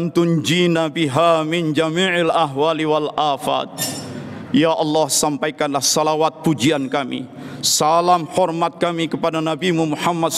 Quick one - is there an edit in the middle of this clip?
no; 0 cuts

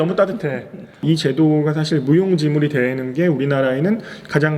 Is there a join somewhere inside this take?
yes; 1 cut; at 1.0 s

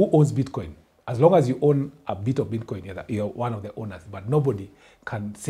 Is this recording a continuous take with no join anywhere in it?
yes; 0 cuts

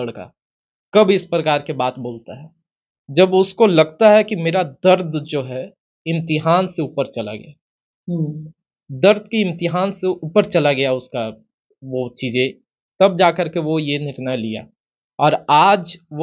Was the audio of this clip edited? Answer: no; 0 cuts

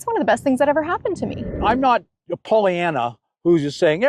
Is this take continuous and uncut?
no; 1 cut; at 1.5 s

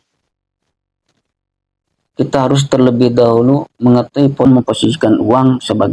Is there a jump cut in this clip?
yes; 1 cut; at 4.5 s

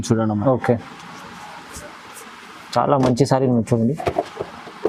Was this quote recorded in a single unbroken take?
yes; 0 cuts

